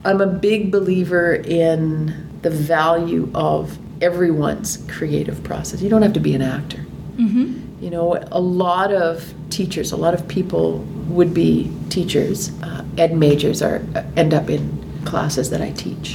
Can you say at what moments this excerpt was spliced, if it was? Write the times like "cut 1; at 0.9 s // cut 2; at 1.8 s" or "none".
none